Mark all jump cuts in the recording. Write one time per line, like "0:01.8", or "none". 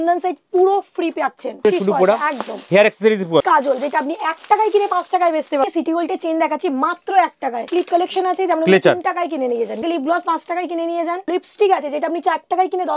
0:01.6
0:03.4
0:05.6
0:07.7
0:09.8
0:11.3